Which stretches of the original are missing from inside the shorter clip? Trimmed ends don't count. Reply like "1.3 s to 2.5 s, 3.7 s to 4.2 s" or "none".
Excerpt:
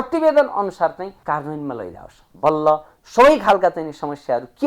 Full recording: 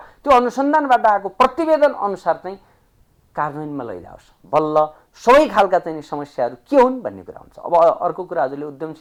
2.6 s to 3.2 s